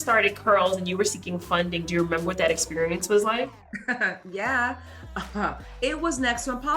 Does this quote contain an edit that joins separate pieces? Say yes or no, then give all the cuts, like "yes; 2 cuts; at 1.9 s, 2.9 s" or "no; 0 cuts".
no; 0 cuts